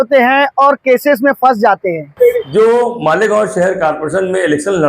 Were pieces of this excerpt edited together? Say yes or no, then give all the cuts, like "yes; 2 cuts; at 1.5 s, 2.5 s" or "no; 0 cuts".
yes; 1 cut; at 2.4 s